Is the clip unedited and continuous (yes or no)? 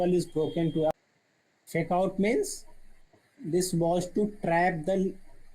no